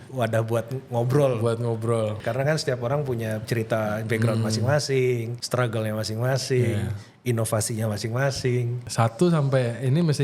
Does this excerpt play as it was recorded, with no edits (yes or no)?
no